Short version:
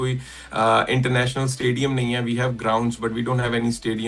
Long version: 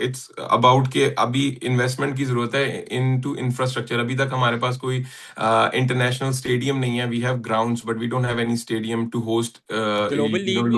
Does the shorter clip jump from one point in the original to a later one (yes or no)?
no